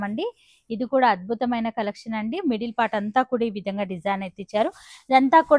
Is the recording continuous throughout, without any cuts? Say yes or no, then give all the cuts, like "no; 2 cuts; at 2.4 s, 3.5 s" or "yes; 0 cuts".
yes; 0 cuts